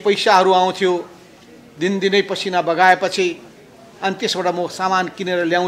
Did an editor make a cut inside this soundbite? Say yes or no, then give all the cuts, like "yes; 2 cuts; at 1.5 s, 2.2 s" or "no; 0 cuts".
no; 0 cuts